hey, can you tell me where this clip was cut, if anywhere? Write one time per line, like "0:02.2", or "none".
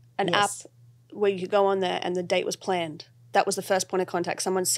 none